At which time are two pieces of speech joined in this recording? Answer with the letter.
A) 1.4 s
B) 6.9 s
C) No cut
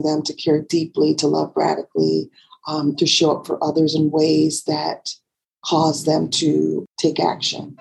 B